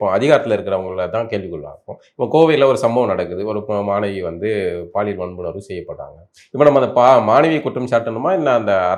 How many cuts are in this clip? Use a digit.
0